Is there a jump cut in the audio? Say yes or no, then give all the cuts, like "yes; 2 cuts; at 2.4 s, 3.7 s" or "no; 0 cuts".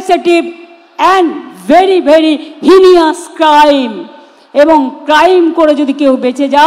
no; 0 cuts